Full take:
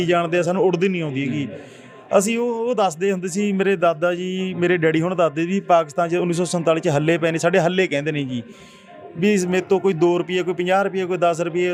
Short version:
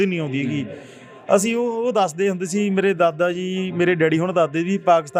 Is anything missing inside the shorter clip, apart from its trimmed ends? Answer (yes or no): no